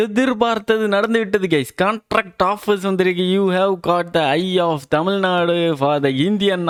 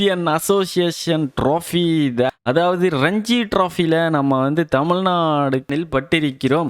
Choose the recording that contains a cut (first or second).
second